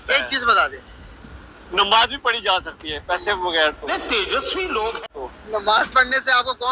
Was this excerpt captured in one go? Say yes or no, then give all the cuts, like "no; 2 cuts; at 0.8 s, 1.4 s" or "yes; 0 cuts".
no; 2 cuts; at 3.8 s, 5.1 s